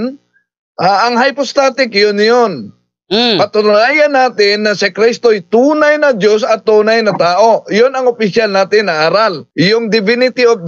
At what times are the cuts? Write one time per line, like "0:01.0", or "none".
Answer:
0:09.4